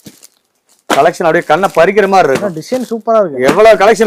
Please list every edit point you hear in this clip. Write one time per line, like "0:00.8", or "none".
none